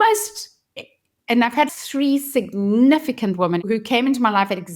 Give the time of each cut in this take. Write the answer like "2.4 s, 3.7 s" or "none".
1.7 s, 3.6 s